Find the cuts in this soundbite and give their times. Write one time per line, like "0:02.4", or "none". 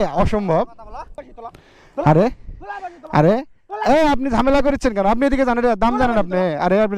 0:01.2